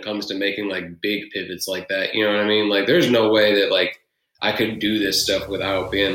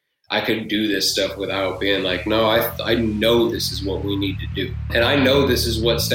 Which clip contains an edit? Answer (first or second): second